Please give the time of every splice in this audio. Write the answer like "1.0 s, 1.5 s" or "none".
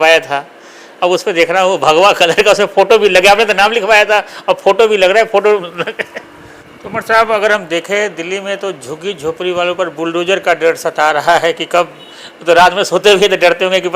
6.6 s